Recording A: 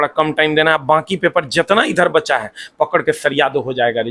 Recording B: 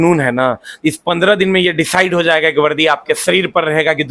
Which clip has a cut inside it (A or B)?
B